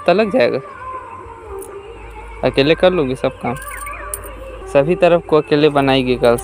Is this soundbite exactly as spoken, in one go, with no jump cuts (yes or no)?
no